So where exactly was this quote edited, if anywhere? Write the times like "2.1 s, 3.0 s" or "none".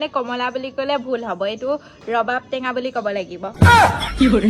3.5 s

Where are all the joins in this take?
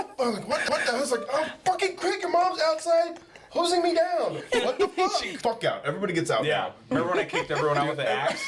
5.3 s

